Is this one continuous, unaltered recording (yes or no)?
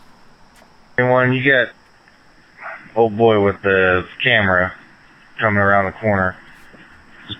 no